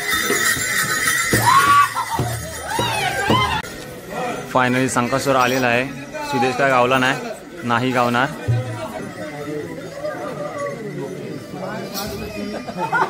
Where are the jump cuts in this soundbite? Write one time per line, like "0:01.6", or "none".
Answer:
0:03.6
0:09.0

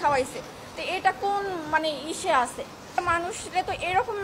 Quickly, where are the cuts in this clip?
0:02.9

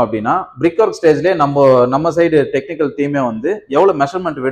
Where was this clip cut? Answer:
none

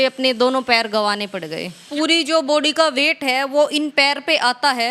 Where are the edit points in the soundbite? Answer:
0:01.8

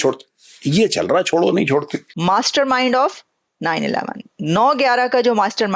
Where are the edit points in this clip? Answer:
0:02.1

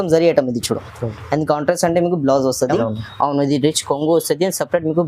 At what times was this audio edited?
0:02.8

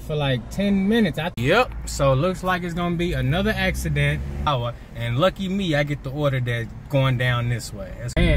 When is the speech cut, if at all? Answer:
0:01.3
0:04.5

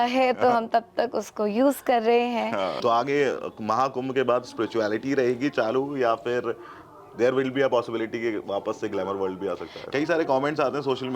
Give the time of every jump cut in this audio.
0:02.8
0:09.8

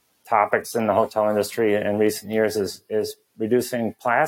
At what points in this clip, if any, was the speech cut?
none

